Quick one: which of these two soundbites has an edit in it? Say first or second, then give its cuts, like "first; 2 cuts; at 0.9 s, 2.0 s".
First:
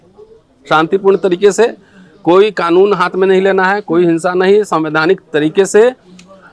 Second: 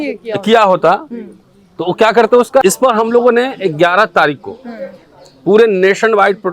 second; 1 cut; at 2.6 s